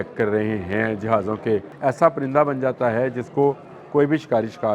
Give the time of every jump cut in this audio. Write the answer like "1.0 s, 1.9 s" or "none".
1.7 s